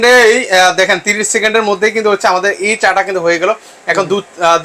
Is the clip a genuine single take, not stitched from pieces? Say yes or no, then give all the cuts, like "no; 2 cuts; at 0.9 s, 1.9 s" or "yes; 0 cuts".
yes; 0 cuts